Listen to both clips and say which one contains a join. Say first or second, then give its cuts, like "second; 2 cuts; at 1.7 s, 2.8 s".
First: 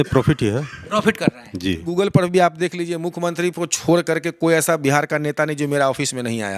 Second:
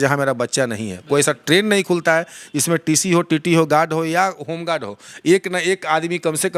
first; 1 cut; at 1.9 s